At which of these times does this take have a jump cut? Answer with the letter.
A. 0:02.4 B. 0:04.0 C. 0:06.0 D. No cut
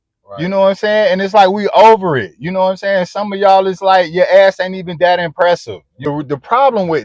C